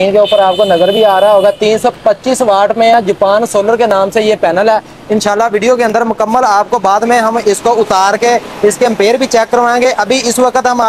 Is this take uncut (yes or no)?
yes